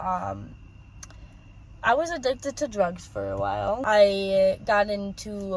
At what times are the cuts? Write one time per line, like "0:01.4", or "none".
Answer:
0:03.8